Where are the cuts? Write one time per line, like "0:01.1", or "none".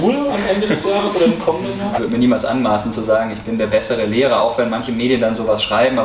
0:01.9